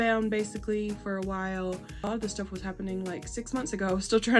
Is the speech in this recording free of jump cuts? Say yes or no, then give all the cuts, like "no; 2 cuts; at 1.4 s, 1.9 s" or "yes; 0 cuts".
no; 1 cut; at 2.1 s